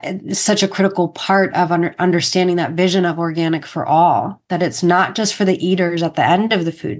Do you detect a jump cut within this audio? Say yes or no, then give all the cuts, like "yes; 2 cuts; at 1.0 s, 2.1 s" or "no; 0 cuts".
no; 0 cuts